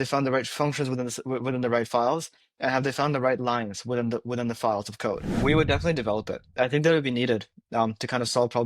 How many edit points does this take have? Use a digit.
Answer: 1